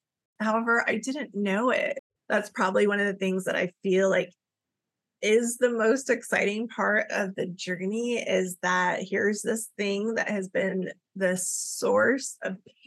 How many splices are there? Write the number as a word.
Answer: one